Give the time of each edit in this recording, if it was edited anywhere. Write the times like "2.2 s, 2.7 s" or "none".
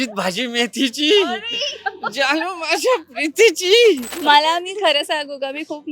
4.1 s